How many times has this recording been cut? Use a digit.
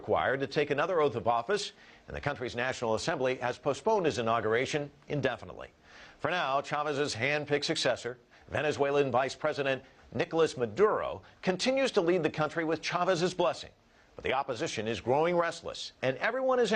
1